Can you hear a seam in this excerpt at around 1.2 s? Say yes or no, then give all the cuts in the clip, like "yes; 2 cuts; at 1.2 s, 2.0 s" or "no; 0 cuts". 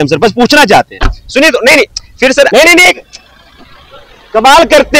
no; 1 cut; at 2.5 s